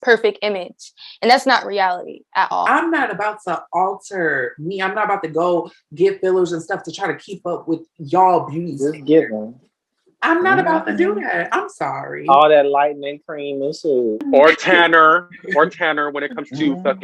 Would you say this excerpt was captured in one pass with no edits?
no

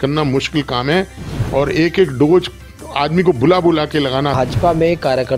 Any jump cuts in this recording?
yes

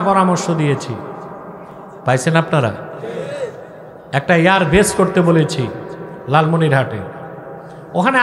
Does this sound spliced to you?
yes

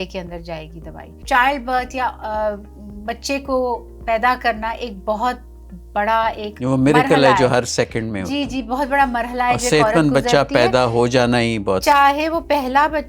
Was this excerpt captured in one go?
no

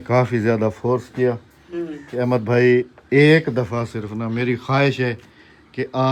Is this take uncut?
yes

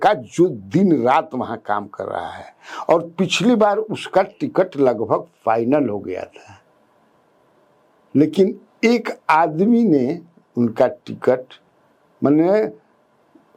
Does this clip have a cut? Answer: no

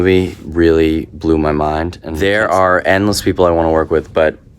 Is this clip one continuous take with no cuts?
no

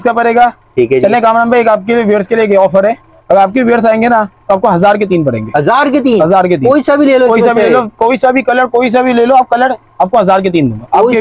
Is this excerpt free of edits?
yes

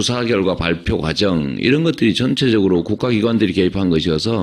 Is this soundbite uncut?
no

